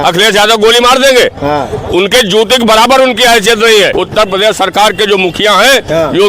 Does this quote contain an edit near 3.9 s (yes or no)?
yes